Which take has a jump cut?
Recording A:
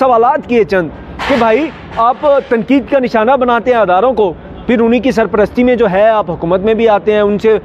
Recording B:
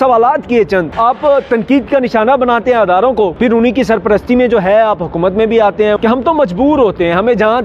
B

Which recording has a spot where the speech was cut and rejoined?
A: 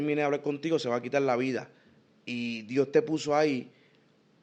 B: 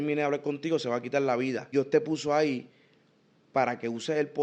B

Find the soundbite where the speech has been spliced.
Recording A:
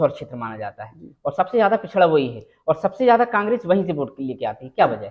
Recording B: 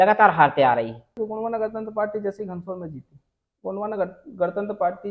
B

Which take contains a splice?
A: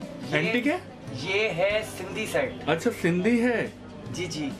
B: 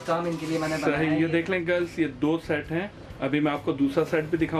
B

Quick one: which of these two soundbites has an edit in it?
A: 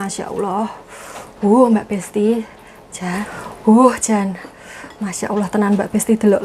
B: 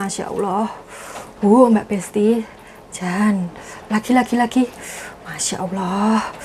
A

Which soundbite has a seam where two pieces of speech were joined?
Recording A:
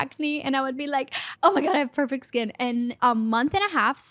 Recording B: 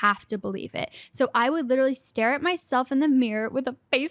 A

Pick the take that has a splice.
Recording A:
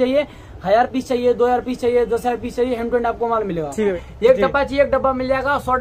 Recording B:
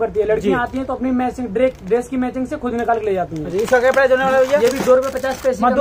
A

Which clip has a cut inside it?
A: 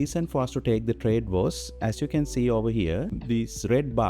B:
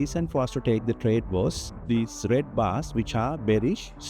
B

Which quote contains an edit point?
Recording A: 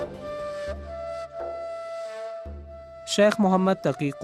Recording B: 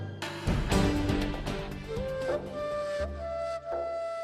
A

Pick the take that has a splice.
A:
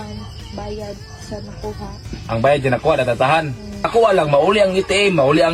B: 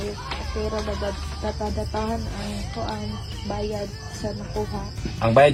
A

